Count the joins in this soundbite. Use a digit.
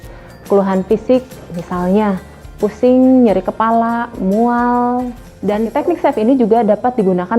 1